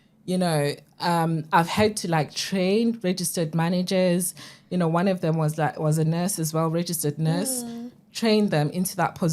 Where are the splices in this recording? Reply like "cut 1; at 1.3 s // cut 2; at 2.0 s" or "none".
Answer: none